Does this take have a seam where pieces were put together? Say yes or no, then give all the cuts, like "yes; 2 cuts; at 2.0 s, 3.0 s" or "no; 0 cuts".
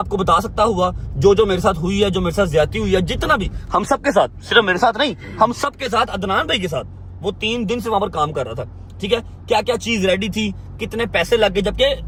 no; 0 cuts